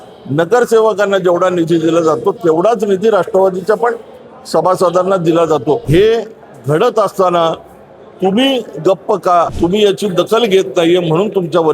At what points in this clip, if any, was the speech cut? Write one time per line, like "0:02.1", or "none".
0:05.8
0:09.5